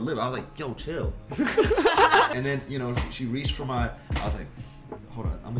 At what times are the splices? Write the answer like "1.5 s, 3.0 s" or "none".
1.2 s, 2.3 s